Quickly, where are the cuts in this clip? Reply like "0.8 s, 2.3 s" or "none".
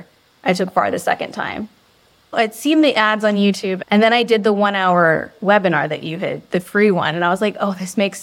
2.3 s, 3.7 s